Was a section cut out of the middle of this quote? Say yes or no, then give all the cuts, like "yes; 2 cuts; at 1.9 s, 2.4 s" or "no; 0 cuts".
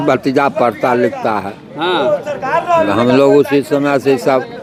no; 0 cuts